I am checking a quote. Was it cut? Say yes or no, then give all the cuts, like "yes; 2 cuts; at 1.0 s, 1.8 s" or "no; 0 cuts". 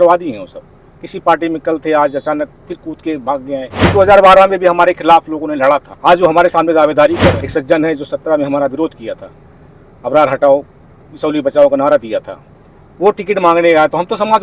yes; 3 cuts; at 3.9 s, 5.9 s, 7.4 s